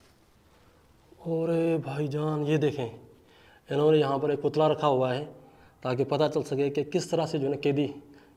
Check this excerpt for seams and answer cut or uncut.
uncut